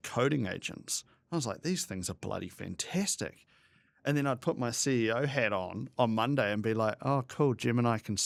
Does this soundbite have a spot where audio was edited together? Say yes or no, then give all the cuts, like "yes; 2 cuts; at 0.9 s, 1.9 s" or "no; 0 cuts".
no; 0 cuts